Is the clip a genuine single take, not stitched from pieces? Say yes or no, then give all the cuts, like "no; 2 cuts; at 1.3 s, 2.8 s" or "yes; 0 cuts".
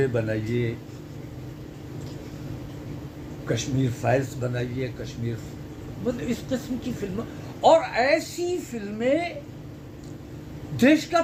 yes; 0 cuts